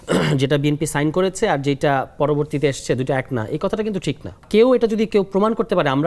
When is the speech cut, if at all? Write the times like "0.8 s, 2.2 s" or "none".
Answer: 4.4 s